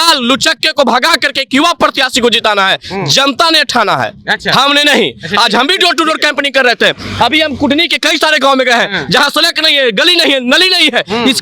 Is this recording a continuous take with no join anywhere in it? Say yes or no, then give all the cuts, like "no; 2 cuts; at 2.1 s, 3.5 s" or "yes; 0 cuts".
yes; 0 cuts